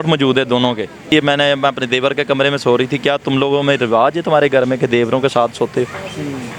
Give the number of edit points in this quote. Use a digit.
1